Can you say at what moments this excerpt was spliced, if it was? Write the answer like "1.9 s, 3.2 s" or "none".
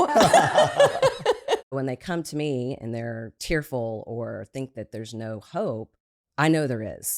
1.7 s, 3.3 s